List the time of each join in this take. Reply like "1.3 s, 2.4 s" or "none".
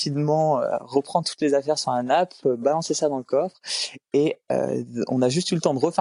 none